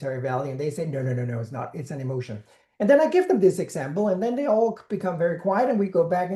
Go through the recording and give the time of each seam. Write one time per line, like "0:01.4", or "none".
none